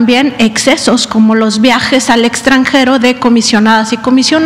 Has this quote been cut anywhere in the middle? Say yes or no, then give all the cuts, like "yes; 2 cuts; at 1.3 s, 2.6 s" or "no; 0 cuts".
no; 0 cuts